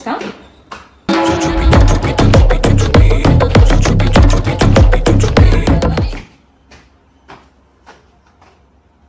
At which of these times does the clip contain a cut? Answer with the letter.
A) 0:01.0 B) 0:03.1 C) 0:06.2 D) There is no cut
D